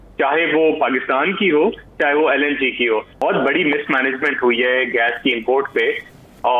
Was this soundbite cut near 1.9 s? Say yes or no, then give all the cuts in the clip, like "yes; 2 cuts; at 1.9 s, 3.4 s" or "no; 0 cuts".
no; 1 cut; at 3.2 s